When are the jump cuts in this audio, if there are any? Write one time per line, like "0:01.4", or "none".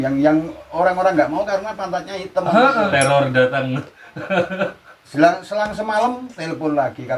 0:02.9